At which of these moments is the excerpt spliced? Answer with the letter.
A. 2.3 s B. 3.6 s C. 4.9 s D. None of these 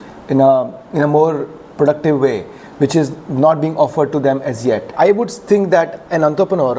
C